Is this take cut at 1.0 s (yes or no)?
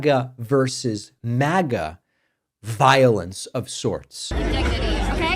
no